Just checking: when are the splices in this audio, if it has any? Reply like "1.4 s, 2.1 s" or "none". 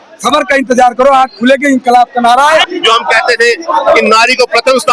2.7 s